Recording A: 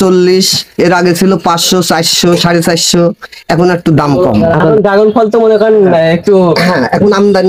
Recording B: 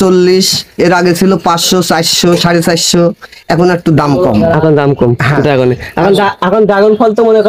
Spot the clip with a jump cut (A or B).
A